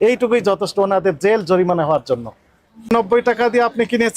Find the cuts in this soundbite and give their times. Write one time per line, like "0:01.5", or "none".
0:02.9